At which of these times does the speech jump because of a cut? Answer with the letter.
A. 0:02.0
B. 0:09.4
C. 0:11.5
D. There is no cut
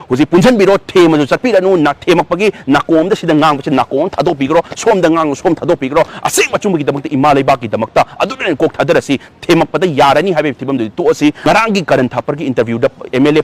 C